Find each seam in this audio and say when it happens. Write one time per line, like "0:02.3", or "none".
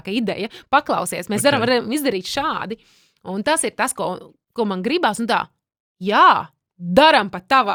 none